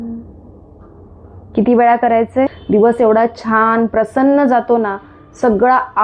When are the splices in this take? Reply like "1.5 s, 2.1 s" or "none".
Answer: 2.6 s